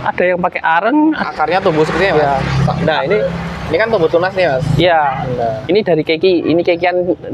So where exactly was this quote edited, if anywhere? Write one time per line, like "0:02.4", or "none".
0:01.2

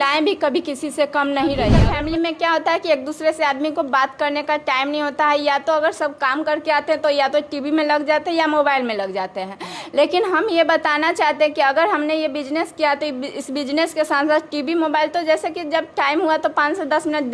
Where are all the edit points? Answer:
0:01.8

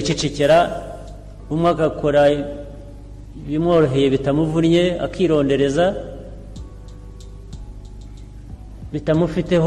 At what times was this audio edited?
none

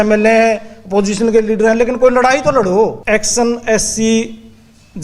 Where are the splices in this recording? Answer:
0:03.0

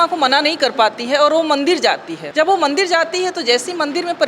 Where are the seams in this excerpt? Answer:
0:02.1

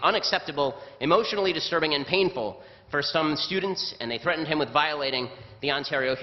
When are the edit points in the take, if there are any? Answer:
none

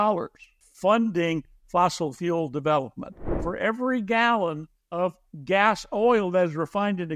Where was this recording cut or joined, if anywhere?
0:03.4

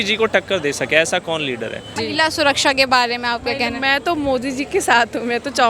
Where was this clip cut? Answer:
0:01.9

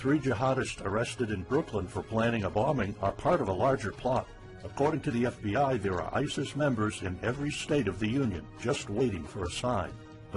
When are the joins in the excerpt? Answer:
0:09.3

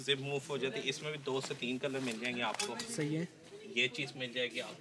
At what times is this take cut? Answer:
none

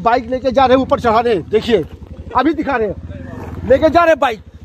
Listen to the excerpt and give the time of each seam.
none

